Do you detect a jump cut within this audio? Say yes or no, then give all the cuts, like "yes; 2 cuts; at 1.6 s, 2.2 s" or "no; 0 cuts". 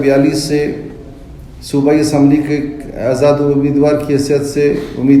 no; 0 cuts